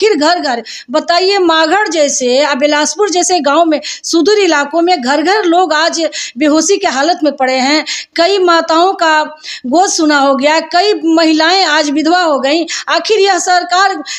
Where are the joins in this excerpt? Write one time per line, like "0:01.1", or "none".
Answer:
none